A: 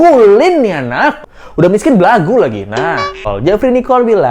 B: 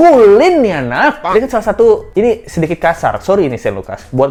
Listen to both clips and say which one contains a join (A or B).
A